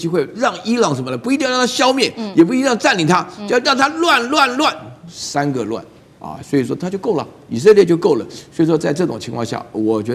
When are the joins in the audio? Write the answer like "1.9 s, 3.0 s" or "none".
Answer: none